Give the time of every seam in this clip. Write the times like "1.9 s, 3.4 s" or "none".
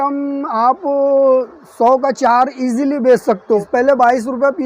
3.6 s